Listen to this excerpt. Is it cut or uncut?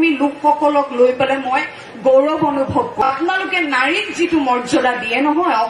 cut